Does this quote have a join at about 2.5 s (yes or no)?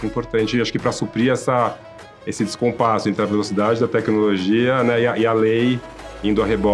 no